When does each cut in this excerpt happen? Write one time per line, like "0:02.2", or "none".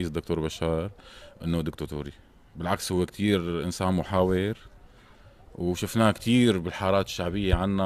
0:02.8